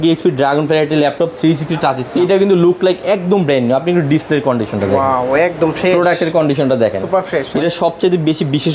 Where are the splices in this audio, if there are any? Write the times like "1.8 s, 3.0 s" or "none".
2.1 s, 7.5 s